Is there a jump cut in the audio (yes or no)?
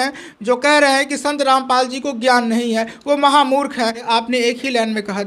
yes